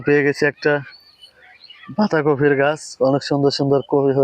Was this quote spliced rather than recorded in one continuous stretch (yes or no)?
no